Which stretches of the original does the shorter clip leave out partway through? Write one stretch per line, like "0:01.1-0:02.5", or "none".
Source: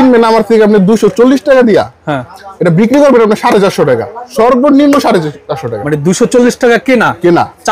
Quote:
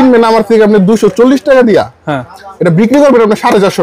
none